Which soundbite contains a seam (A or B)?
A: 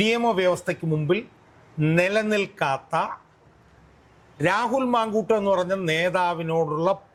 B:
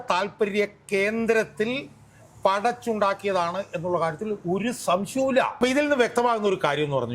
B